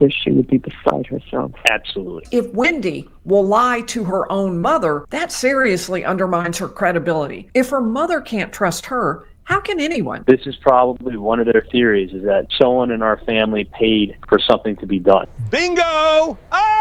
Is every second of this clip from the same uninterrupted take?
no; 4 cuts; at 2.2 s, 5.1 s, 7.4 s, 10.1 s

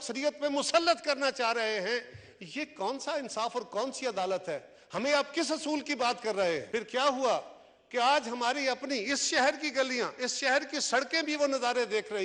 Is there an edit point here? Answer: yes; 1 cut; at 6.6 s

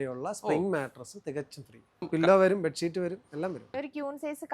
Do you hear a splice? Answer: yes; 2 cuts; at 2.1 s, 3.7 s

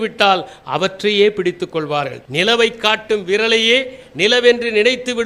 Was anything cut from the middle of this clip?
no; 0 cuts

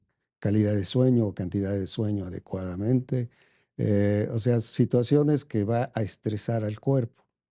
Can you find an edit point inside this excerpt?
no; 0 cuts

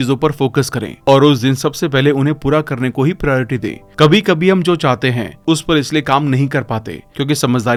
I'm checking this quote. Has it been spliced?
no; 0 cuts

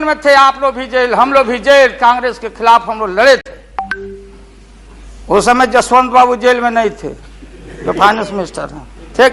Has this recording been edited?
no; 0 cuts

